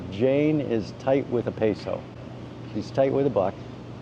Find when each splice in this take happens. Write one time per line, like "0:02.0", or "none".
none